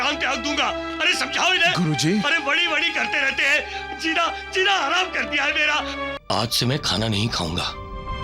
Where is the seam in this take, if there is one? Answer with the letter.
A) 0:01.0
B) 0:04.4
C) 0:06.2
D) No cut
C